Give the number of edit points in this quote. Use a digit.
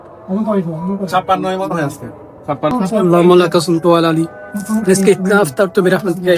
0